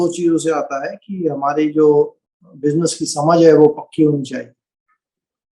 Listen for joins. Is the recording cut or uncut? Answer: uncut